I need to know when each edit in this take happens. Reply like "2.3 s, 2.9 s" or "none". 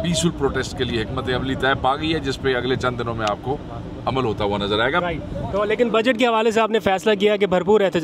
none